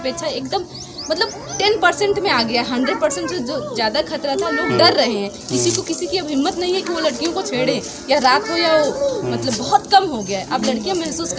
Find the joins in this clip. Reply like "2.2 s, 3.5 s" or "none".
none